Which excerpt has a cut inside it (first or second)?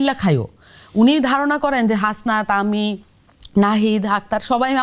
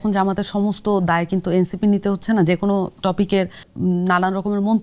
second